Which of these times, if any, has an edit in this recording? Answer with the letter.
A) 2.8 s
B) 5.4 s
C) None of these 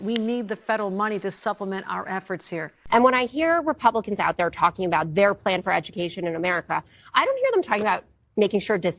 A